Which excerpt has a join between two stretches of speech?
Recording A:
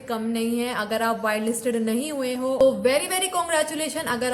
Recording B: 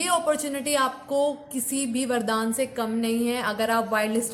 A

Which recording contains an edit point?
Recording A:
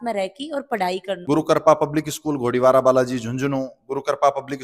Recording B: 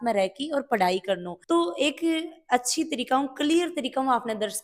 A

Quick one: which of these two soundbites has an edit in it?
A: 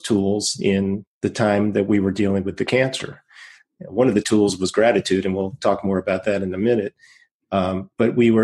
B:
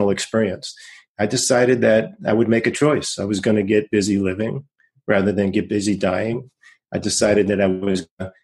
A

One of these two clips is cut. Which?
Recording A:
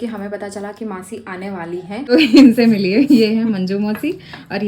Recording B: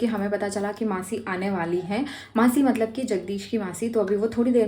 A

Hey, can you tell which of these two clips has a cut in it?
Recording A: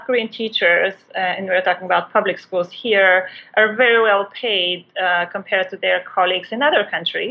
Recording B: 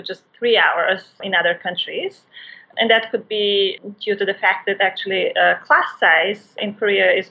B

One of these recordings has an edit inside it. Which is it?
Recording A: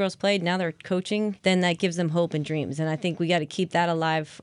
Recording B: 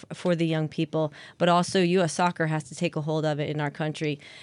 A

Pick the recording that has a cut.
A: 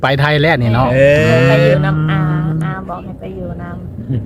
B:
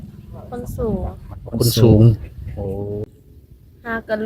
B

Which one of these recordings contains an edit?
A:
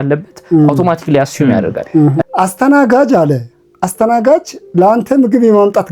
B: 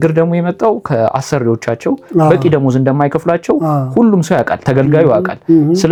A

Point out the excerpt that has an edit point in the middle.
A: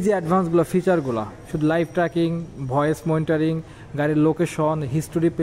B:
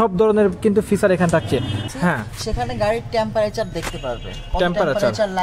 B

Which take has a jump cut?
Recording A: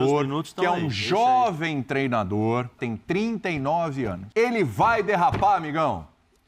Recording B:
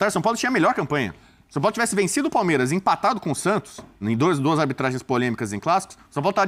A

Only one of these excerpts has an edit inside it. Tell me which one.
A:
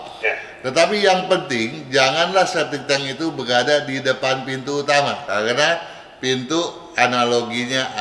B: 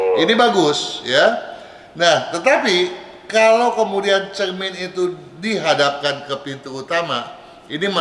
A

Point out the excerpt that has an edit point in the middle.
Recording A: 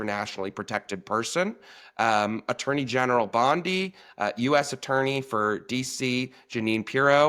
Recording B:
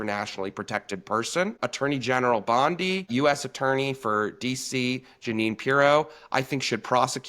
B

